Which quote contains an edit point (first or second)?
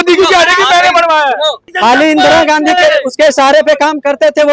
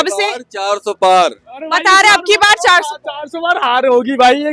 first